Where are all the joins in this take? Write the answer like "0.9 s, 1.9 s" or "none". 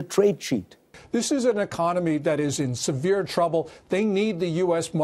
0.9 s